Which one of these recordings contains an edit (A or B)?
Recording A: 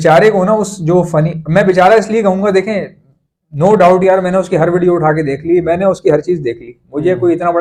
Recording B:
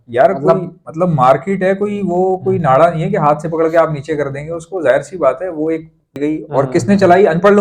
B